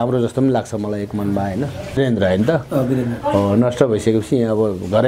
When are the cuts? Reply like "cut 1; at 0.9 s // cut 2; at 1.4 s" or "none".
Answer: cut 1; at 2.0 s